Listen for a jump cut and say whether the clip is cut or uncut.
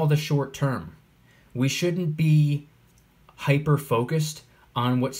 uncut